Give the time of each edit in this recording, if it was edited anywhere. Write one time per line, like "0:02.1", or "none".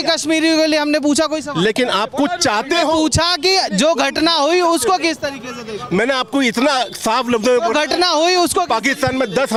none